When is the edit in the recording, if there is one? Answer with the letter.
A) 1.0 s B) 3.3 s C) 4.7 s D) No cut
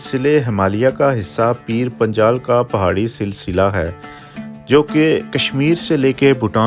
D